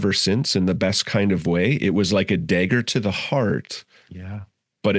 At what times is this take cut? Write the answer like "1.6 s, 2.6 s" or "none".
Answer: none